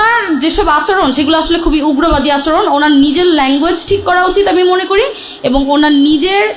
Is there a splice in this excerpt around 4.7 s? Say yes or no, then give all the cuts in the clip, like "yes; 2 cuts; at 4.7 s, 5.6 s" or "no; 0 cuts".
no; 0 cuts